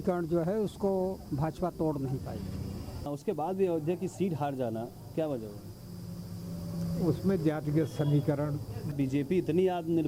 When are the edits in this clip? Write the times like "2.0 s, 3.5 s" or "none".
3.1 s, 8.9 s